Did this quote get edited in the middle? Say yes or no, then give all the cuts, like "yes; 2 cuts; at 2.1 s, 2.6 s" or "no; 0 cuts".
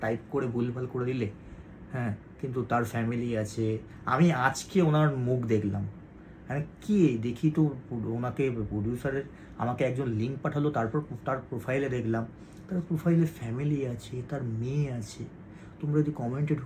no; 0 cuts